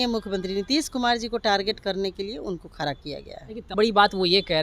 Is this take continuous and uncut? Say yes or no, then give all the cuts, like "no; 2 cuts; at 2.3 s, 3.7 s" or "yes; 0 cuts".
no; 1 cut; at 3.7 s